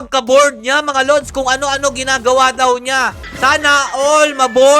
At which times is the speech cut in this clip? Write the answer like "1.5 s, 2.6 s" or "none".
none